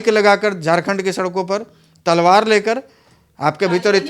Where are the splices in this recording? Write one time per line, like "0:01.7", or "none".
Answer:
none